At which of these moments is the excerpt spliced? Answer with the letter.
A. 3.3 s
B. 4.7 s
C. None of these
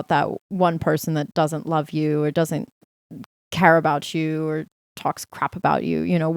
C